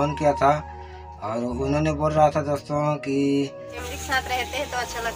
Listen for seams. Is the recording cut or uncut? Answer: cut